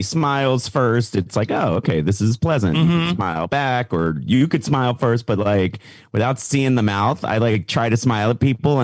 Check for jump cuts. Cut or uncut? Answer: uncut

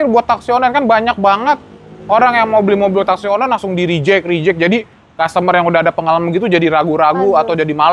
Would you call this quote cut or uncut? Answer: uncut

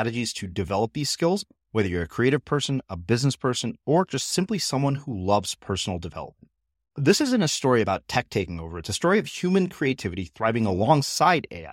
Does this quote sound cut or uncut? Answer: uncut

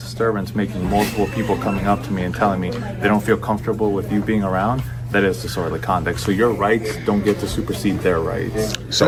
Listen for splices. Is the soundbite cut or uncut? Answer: uncut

